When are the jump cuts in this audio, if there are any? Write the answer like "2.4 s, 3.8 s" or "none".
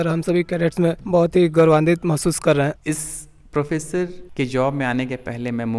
2.8 s